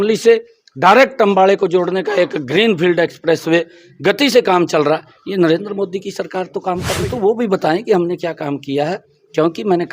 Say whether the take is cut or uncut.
cut